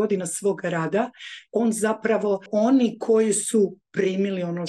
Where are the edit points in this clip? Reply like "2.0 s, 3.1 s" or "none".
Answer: 2.5 s